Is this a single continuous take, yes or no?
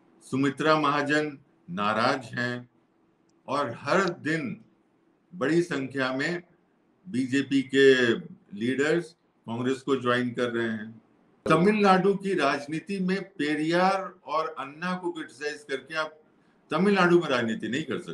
no